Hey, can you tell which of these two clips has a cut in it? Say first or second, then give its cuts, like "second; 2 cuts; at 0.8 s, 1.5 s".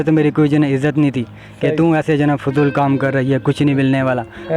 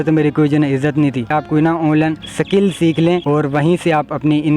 second; 3 cuts; at 1.3 s, 2.3 s, 3.2 s